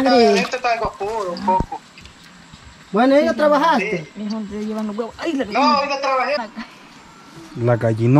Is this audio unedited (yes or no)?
no